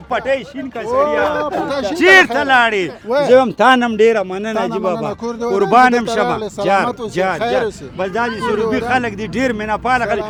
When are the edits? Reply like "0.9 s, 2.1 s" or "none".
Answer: none